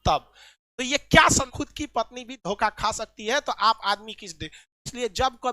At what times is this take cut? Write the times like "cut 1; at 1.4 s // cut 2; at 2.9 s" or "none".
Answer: cut 1; at 1.5 s

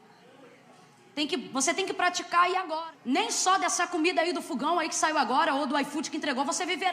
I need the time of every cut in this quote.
cut 1; at 2.7 s

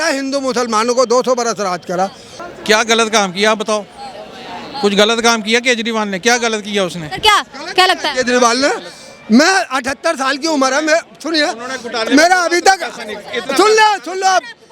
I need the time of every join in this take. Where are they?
cut 1; at 2.3 s

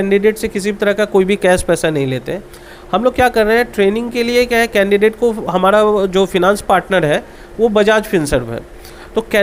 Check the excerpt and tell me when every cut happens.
none

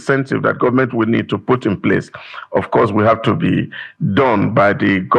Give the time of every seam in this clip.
none

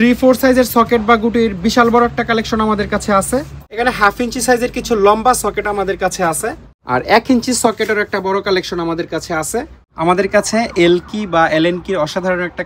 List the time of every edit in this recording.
cut 1; at 3.6 s // cut 2; at 6.7 s // cut 3; at 9.8 s

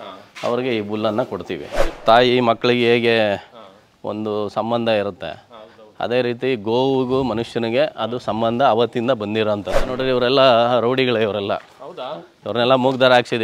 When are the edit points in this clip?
cut 1; at 1.8 s // cut 2; at 9.8 s

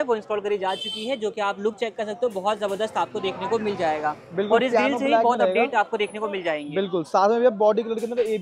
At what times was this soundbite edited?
none

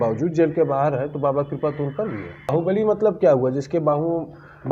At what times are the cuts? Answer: cut 1; at 2.5 s

